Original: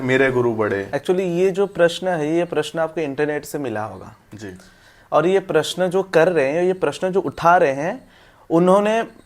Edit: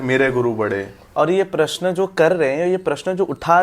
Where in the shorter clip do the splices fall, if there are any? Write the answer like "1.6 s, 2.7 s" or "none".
0.9 s